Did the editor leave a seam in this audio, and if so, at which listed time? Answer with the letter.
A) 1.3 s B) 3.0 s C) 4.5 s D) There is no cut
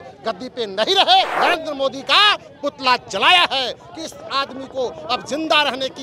A